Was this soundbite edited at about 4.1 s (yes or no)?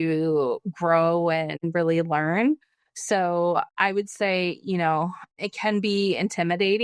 no